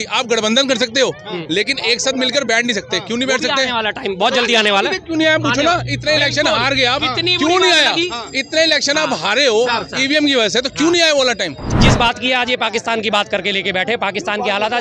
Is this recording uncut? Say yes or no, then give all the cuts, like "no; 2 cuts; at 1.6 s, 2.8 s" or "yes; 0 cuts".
no; 1 cut; at 11.6 s